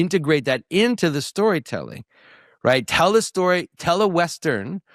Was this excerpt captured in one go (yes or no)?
yes